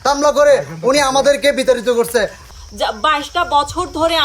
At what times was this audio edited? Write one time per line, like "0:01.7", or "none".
0:02.5